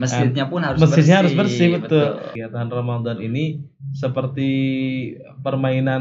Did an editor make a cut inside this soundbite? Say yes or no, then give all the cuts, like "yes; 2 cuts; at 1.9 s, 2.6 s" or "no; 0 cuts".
yes; 1 cut; at 2.3 s